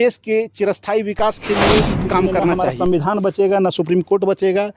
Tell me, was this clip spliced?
yes; 1 cut; at 2.6 s

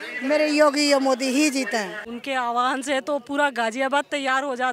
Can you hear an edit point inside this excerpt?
yes; 1 cut; at 2.0 s

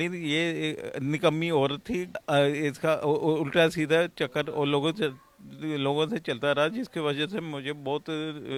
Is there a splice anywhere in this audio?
no; 0 cuts

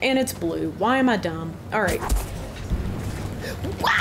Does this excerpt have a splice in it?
yes; 1 cut; at 2.6 s

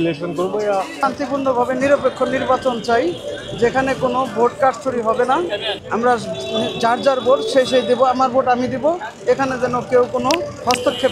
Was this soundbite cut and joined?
yes; 1 cut; at 0.9 s

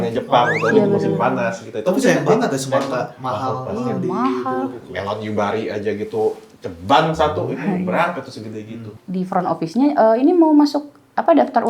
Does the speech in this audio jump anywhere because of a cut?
yes; 1 cut; at 8.9 s

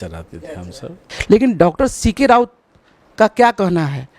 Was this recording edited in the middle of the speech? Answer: yes; 1 cut; at 1.1 s

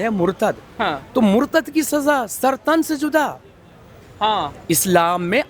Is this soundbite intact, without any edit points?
yes; 0 cuts

